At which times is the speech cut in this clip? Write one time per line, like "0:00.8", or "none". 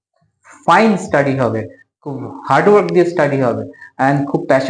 none